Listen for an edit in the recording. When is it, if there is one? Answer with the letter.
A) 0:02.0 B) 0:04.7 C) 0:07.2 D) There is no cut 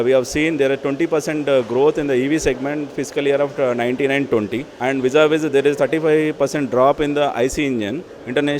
B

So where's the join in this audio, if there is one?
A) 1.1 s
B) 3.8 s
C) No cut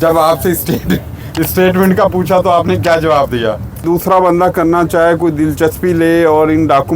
B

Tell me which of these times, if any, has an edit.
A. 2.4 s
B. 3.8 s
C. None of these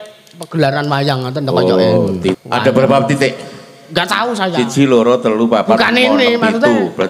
A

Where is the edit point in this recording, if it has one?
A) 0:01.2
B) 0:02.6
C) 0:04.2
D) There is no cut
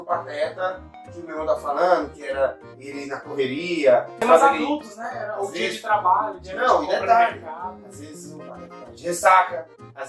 C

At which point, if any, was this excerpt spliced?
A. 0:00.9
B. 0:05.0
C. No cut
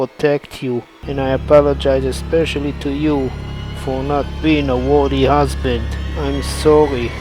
A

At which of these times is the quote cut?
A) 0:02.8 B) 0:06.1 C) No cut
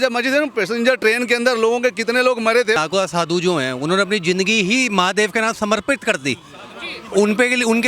A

